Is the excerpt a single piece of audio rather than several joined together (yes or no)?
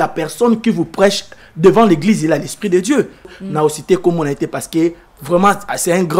no